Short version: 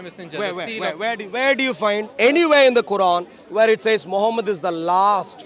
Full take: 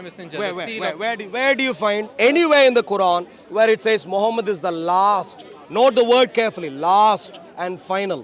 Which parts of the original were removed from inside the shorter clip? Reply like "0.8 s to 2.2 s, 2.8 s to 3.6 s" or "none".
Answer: none